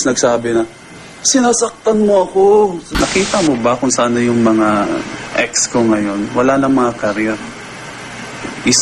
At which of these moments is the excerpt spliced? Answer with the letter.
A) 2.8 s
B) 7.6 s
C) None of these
A